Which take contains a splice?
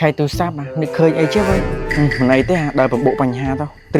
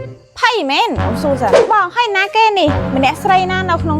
second; 1 cut; at 1.6 s

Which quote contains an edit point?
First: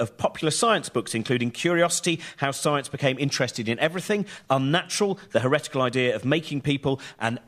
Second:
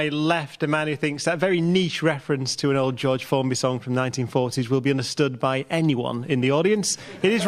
second; 1 cut; at 3.5 s

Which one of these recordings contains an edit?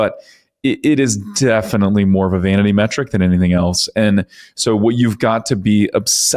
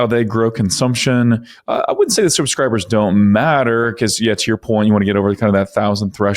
second; 1 cut; at 1.5 s

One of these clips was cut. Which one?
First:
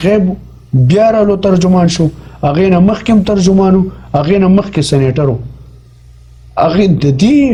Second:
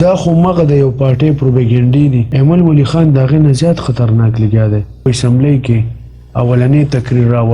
second; 2 cuts; at 2.3 s, 5.1 s

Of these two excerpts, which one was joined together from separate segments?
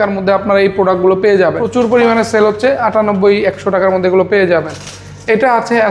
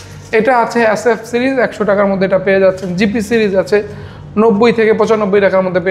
first; 1 cut; at 1.6 s

